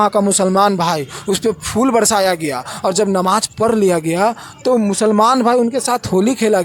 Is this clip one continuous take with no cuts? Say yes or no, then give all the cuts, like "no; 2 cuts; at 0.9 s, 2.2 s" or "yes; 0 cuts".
yes; 0 cuts